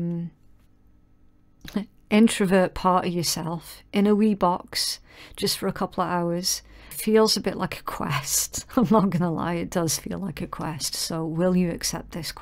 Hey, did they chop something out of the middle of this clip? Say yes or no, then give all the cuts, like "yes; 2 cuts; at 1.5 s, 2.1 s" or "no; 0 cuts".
yes; 1 cut; at 6.8 s